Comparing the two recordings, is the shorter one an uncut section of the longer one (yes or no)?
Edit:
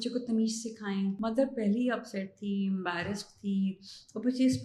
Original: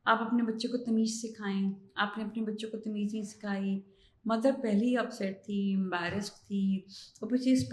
no